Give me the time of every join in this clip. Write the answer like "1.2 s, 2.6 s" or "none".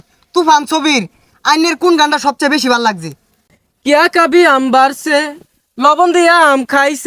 3.3 s